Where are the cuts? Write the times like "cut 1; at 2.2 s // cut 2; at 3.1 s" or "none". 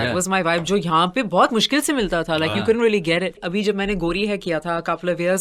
cut 1; at 3.4 s